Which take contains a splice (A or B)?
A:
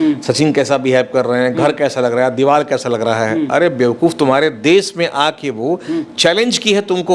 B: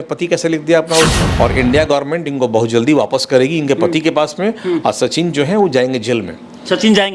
B